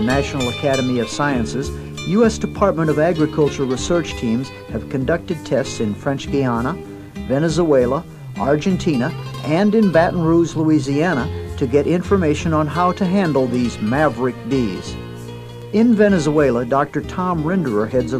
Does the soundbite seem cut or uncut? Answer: cut